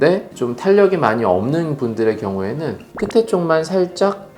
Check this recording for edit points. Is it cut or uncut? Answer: cut